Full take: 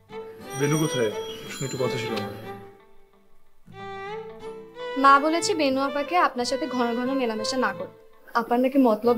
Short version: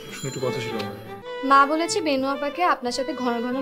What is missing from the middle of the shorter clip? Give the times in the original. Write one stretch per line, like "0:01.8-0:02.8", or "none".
0:02.5-0:04.7